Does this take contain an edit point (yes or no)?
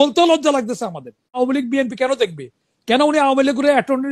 yes